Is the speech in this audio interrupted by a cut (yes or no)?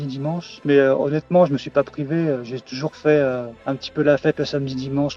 no